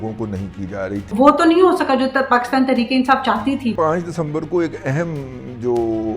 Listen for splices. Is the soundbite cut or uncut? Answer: cut